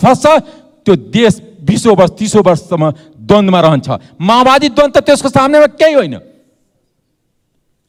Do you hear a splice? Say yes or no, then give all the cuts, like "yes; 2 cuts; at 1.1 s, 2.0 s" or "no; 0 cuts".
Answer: no; 0 cuts